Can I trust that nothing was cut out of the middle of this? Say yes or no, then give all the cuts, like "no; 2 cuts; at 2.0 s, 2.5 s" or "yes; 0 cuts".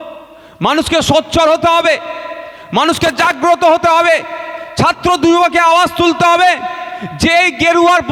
yes; 0 cuts